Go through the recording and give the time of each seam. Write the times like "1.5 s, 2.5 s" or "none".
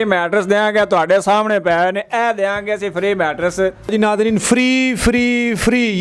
none